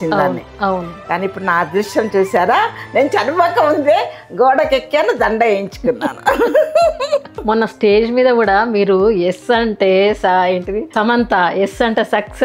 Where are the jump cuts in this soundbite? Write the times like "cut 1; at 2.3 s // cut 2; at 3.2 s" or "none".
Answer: cut 1; at 7.3 s